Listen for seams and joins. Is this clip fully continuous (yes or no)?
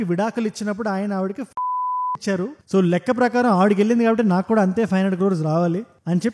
yes